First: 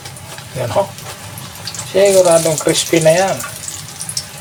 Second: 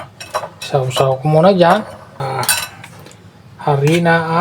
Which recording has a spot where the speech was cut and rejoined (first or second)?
second